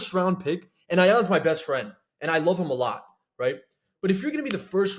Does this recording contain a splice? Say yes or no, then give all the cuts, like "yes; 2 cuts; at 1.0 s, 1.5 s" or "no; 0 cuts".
no; 0 cuts